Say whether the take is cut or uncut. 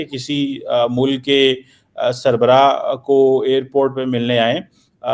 uncut